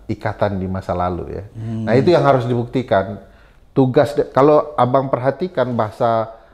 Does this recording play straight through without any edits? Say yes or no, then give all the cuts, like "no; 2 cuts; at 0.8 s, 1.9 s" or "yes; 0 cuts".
yes; 0 cuts